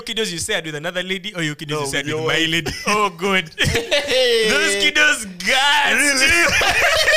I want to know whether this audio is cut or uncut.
uncut